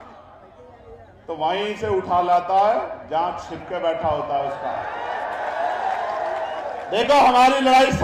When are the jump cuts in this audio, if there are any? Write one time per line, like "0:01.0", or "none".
none